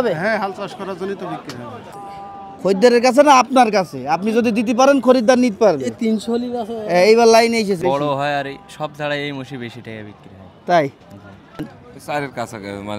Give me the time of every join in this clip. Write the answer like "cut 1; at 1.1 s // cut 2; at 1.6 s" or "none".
cut 1; at 1.9 s // cut 2; at 7.8 s // cut 3; at 11.7 s